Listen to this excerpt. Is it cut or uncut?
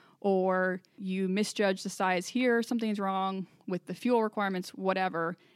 cut